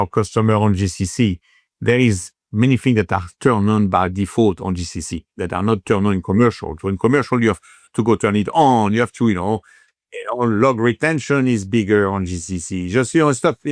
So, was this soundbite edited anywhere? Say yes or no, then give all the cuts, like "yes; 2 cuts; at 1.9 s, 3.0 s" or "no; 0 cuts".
no; 0 cuts